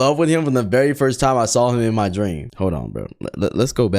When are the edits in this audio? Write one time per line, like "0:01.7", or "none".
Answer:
0:02.4